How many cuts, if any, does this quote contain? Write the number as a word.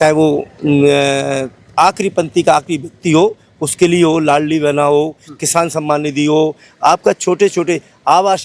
zero